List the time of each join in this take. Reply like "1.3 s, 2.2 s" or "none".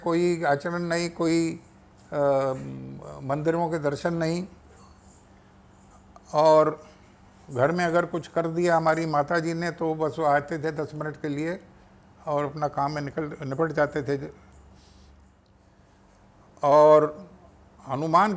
15.4 s

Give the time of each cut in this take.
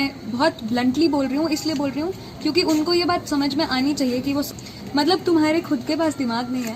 4.5 s

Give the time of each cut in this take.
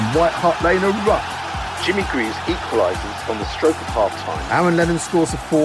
none

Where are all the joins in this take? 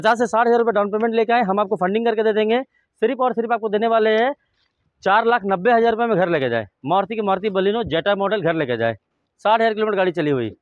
none

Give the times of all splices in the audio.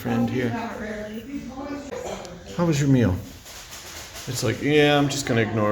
1.9 s

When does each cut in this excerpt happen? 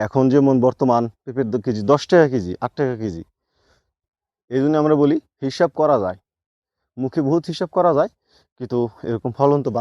4.0 s

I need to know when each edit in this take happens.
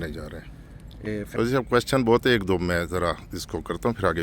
1.4 s

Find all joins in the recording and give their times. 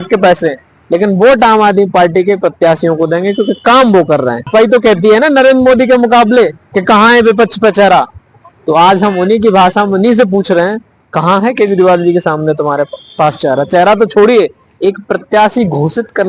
4.5 s

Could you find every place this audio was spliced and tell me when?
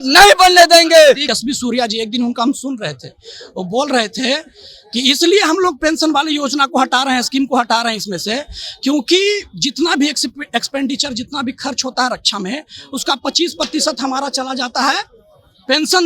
1.3 s

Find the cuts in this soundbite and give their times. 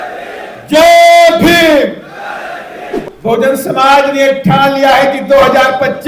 3.1 s

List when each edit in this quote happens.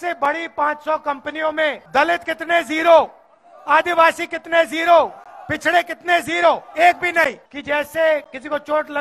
1.8 s, 7.5 s

